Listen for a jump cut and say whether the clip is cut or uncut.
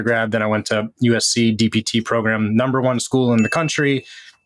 uncut